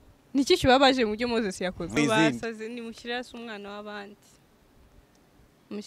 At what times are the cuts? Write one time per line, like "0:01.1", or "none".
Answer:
0:02.0